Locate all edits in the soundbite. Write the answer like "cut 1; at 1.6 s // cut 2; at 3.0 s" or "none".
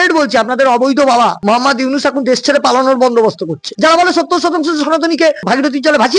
cut 1; at 1.4 s // cut 2; at 3.6 s // cut 3; at 5.5 s